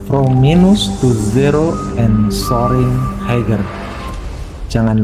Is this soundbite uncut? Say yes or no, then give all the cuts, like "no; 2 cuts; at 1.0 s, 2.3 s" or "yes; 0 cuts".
yes; 0 cuts